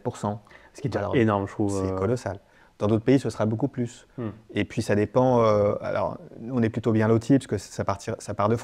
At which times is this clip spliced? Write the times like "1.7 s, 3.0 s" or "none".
none